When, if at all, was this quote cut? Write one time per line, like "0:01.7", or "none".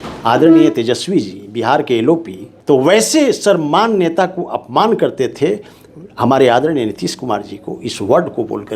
0:02.5

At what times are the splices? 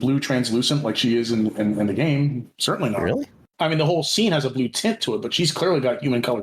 0:03.4

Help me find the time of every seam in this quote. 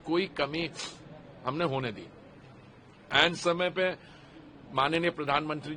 none

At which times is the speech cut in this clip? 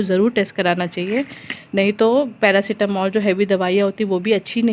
none

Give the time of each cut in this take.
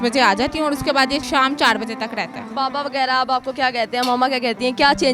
0:01.2
0:02.5

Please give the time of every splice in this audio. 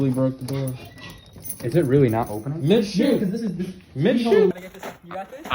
0:04.5

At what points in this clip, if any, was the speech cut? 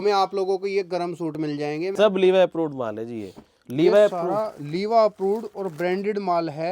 0:01.9

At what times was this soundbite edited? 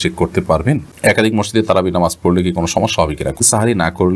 0:00.9
0:03.4

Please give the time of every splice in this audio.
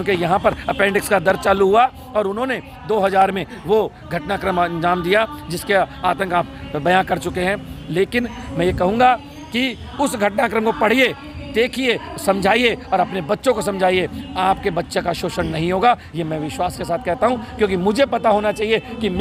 none

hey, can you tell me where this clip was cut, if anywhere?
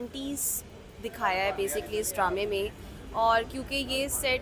none

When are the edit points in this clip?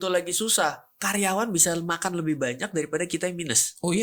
none

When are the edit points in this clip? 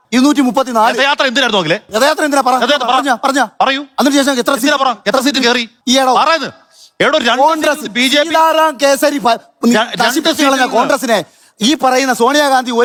none

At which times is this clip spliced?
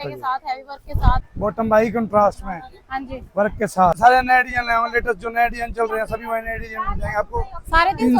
0:01.3
0:04.0

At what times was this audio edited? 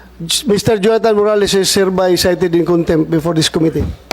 none

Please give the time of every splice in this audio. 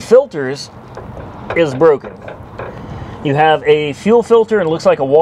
none

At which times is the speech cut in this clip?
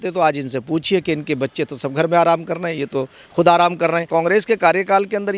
0:04.1

